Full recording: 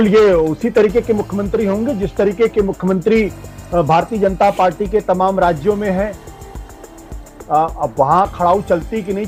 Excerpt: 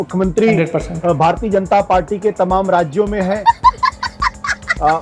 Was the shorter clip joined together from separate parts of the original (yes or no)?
no